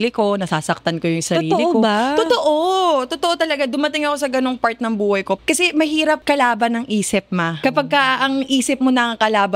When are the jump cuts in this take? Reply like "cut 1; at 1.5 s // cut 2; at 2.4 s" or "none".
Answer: cut 1; at 5.4 s // cut 2; at 6.2 s // cut 3; at 7.6 s